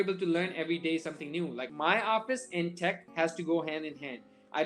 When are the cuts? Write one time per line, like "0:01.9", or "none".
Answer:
0:01.6